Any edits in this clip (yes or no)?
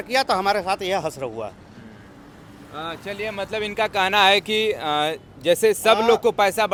no